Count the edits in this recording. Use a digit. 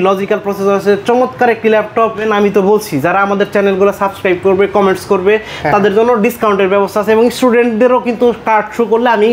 1